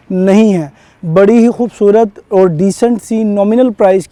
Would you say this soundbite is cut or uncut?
uncut